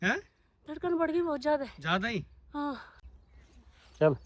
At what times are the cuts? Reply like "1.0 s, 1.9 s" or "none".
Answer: 3.0 s